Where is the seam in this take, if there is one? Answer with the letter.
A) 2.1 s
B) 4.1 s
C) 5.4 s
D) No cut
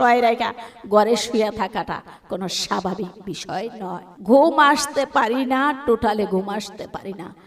B